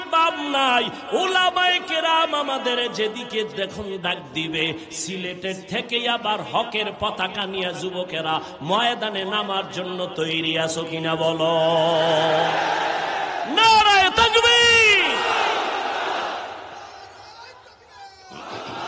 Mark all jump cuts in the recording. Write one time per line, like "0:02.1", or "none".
none

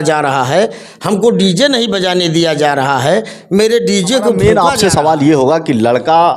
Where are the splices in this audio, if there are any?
0:04.4

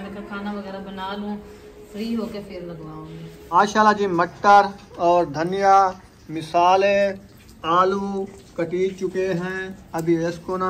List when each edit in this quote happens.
0:03.5

